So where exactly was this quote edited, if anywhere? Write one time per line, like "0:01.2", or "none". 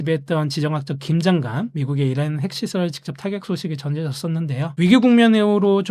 none